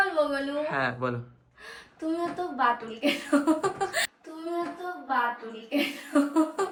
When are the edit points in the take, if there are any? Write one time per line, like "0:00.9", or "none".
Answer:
none

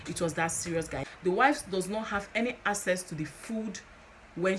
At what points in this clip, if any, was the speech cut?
0:01.0

